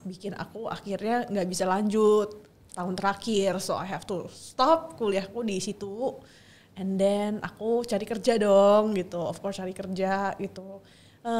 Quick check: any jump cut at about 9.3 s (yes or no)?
no